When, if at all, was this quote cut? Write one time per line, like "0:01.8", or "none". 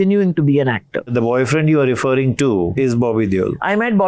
0:01.1
0:03.0